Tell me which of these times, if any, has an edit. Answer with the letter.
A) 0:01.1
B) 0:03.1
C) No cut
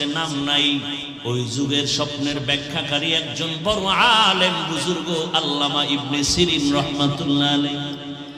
A